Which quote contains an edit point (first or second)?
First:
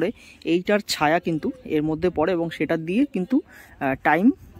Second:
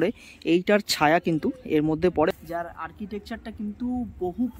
second